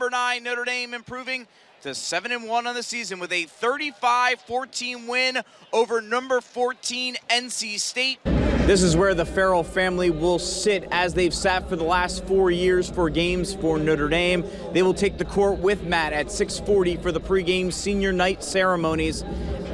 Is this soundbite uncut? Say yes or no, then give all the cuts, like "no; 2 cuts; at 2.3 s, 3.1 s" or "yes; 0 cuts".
no; 1 cut; at 8.2 s